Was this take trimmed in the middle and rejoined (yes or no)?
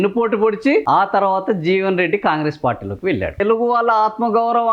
yes